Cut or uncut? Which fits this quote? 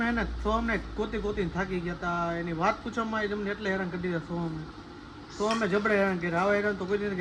uncut